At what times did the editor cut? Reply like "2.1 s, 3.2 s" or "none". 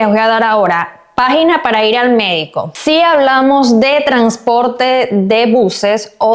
2.7 s